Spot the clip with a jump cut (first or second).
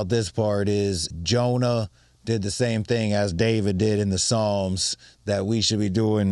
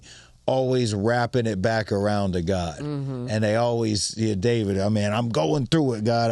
first